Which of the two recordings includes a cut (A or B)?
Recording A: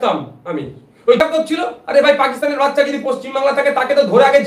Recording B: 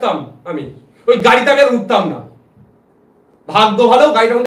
A